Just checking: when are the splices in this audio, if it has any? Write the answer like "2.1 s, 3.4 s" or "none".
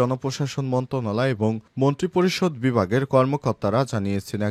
none

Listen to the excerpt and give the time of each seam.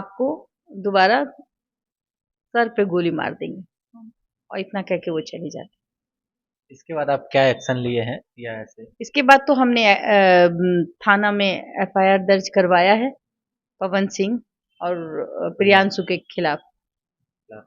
none

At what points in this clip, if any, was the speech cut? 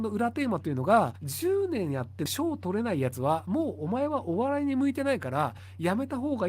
1.2 s, 2.3 s

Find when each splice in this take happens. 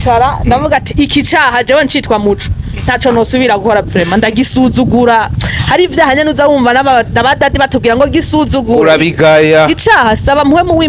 none

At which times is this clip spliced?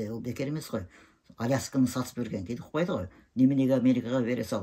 none

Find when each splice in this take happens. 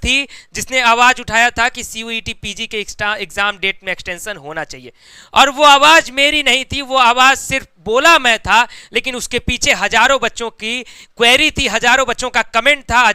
none

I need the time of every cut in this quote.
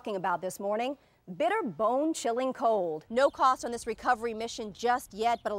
3.0 s

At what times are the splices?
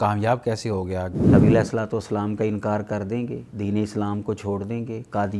1.3 s, 3.4 s

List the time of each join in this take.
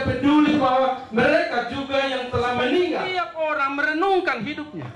3.1 s

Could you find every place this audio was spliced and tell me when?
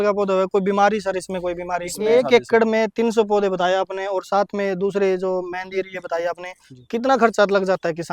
2.0 s

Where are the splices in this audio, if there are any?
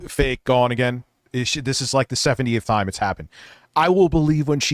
none

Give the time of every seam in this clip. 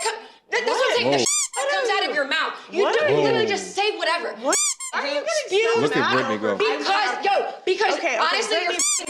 7.7 s

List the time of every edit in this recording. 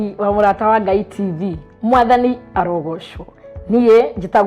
none

